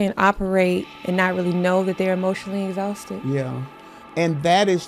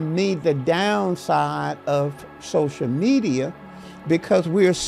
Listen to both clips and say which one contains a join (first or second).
first